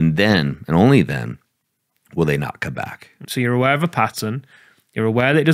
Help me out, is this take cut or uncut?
cut